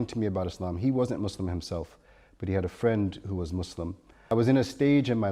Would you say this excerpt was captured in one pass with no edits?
no; 1 cut; at 4.3 s

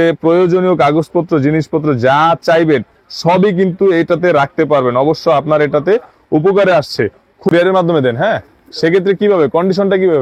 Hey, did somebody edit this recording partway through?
yes; 1 cut; at 7.5 s

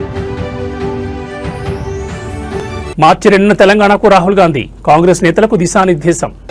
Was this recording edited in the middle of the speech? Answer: no; 0 cuts

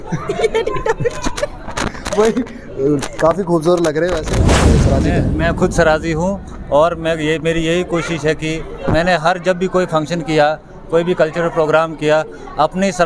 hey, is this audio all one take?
no; 1 cut; at 4.7 s

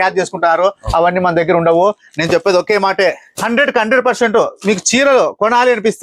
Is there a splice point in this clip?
no; 0 cuts

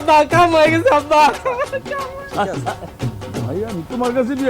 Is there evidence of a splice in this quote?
yes; 1 cut; at 1.8 s

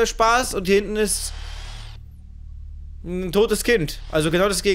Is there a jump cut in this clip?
no; 0 cuts

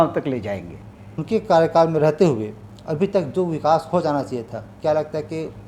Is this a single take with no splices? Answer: no; 1 cut; at 1.1 s

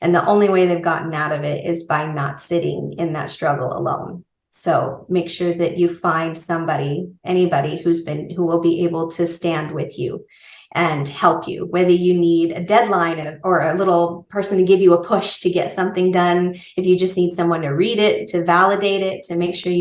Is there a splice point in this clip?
no; 0 cuts

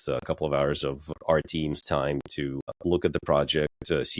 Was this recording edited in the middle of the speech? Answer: yes; 2 cuts; at 1.1 s, 2.8 s

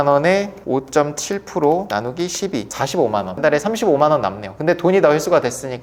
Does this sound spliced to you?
no; 0 cuts

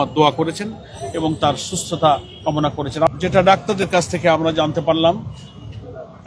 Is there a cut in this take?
yes; 1 cut; at 3.1 s

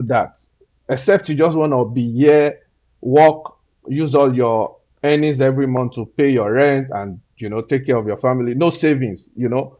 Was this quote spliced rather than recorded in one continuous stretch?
no; 0 cuts

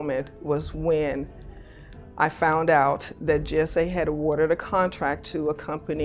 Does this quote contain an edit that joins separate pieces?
no; 0 cuts

